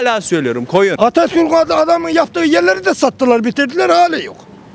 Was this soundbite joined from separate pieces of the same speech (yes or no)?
yes